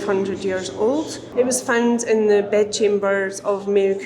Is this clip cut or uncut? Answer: cut